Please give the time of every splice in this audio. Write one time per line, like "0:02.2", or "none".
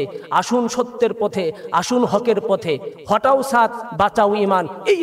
none